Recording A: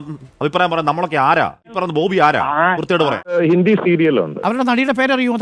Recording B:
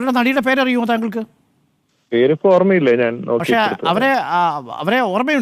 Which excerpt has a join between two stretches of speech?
A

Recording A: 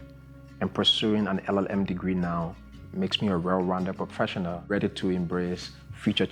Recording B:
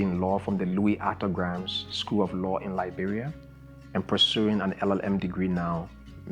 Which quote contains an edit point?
A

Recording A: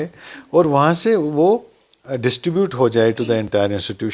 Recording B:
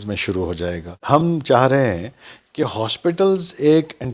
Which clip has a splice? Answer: B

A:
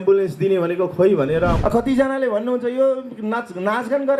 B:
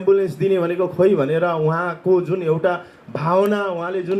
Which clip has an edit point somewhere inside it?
A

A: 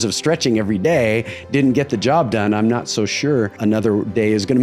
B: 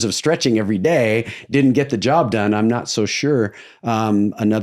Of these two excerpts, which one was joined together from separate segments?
A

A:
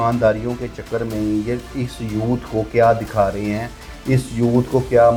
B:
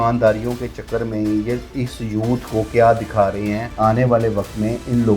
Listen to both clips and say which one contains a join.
B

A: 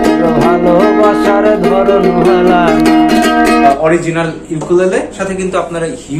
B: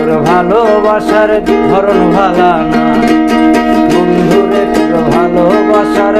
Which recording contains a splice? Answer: A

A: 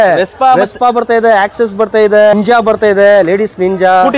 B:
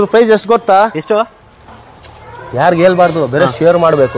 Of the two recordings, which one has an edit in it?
A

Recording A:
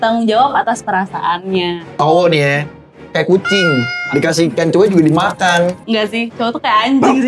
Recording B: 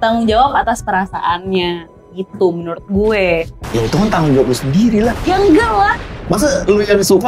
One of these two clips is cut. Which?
A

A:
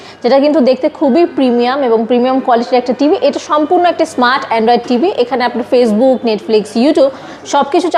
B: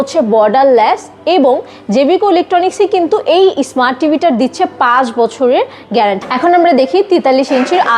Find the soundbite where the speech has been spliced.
B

